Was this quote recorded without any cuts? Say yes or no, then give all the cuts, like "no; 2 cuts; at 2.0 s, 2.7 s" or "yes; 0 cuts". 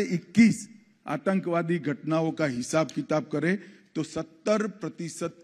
yes; 0 cuts